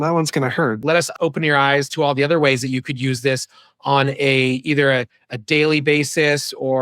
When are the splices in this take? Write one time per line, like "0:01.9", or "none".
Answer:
0:01.0